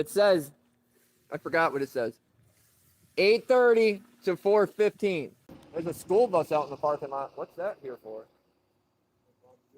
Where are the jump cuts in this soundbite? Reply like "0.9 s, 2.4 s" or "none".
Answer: 5.4 s